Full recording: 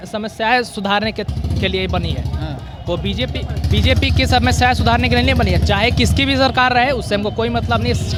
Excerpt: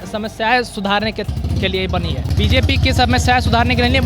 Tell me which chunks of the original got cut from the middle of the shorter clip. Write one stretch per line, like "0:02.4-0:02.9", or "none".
0:02.3-0:03.6